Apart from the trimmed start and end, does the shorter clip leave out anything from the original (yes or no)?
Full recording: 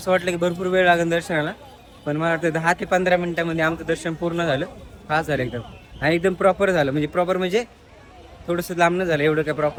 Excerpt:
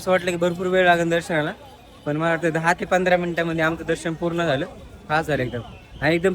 no